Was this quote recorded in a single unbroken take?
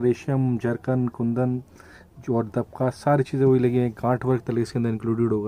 yes; 0 cuts

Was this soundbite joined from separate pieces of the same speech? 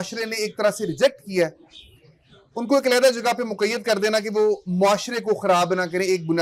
no; 0 cuts

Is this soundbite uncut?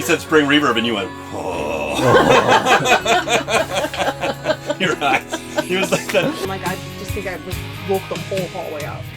no; 1 cut; at 6.4 s

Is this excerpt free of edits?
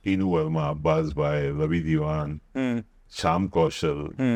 yes; 0 cuts

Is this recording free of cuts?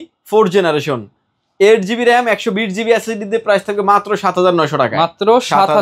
yes; 0 cuts

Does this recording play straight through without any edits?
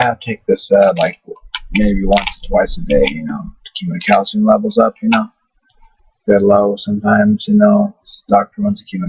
no; 1 cut; at 2.7 s

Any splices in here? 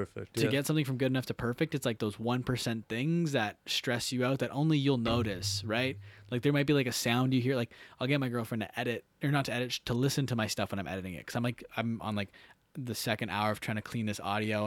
no; 0 cuts

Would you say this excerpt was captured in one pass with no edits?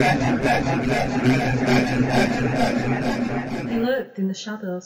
no; 1 cut; at 3.6 s

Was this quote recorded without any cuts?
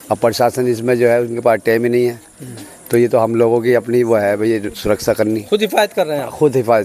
yes; 0 cuts

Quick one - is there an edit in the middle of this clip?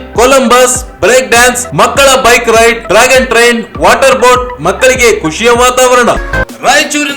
yes; 1 cut; at 6.2 s

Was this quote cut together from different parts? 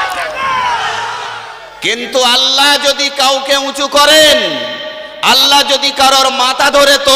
yes; 1 cut; at 1.3 s

